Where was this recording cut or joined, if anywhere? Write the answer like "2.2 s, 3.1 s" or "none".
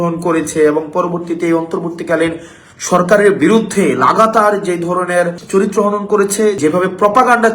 5.4 s, 6.6 s